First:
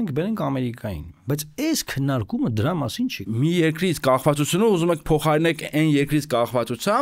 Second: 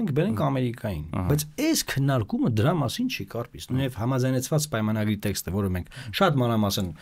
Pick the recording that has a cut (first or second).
first